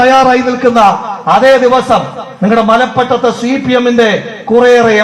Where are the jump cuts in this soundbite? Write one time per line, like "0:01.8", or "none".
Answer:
0:01.1